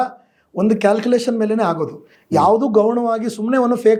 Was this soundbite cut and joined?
no; 0 cuts

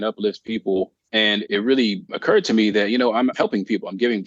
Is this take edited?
yes; 2 cuts; at 1.0 s, 2.1 s

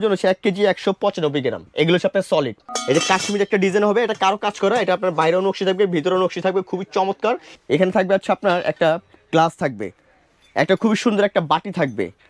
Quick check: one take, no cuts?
no; 3 cuts; at 1.6 s, 2.7 s, 7.5 s

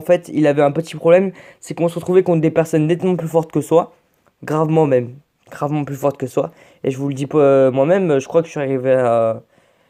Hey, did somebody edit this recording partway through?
no; 0 cuts

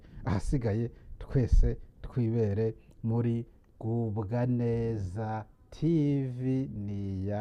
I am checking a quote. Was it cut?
no; 0 cuts

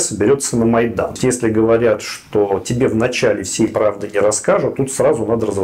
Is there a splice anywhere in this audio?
yes; 1 cut; at 1.1 s

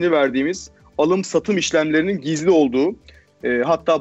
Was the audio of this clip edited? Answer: no; 0 cuts

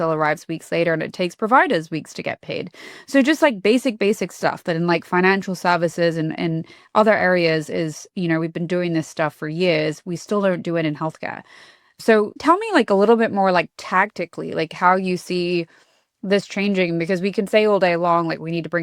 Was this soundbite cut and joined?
no; 0 cuts

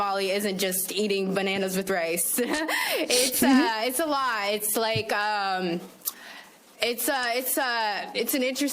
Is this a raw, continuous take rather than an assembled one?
yes; 0 cuts

